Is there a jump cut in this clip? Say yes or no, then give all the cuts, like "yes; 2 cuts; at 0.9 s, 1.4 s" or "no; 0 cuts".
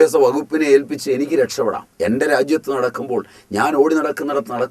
yes; 1 cut; at 1.9 s